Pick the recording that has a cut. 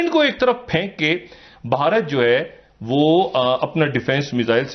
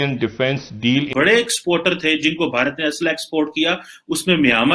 second; 1 cut; at 1.1 s

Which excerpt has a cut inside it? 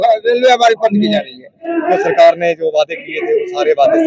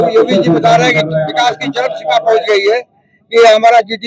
first; 1 cut; at 1.7 s

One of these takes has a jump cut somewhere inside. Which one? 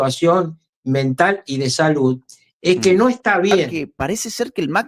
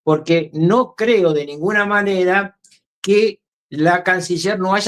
first; 1 cut; at 3.8 s

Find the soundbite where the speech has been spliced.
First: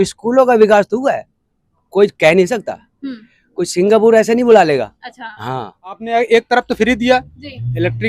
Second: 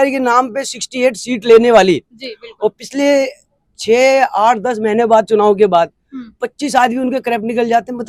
first; 1 cut; at 6.0 s

